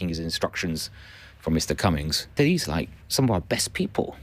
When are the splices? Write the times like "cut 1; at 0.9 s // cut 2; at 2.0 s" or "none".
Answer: cut 1; at 2.3 s

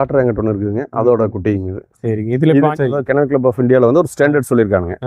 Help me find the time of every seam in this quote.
cut 1; at 2.7 s

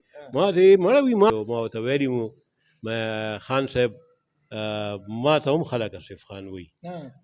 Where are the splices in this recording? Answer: cut 1; at 1.3 s

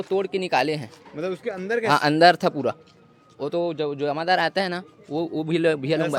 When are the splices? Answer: none

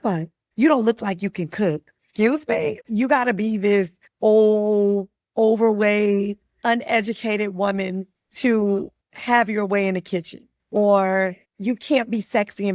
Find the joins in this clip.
none

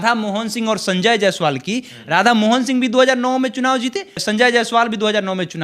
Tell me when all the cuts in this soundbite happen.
cut 1; at 4.2 s

